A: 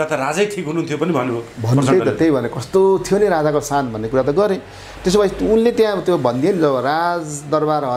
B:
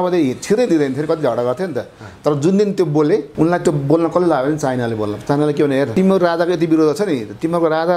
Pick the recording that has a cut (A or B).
B